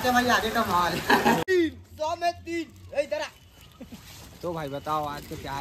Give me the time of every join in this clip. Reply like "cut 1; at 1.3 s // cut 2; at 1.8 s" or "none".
cut 1; at 1.4 s